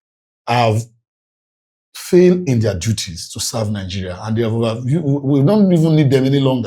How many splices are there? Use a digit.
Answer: 0